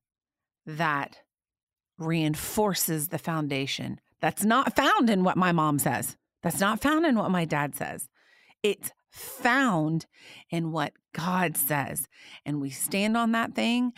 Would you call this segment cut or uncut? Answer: uncut